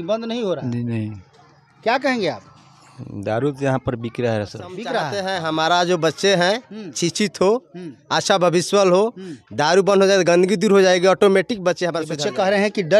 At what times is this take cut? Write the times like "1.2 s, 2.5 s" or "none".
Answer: 5.1 s, 12.1 s